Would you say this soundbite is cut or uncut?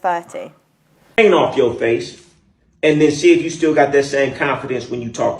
cut